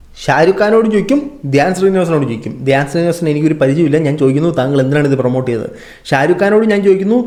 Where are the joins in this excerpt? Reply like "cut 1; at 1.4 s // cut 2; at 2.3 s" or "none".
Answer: none